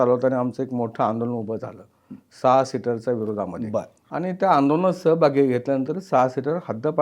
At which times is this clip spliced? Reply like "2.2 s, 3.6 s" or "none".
4.0 s